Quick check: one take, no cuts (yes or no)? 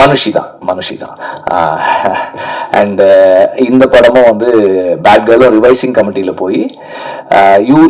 yes